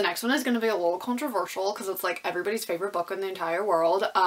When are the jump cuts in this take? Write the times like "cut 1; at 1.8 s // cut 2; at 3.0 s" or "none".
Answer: none